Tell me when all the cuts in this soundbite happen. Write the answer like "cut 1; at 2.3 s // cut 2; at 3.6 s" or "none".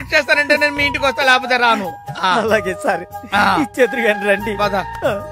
none